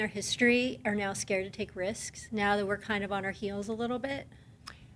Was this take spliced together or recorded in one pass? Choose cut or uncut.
uncut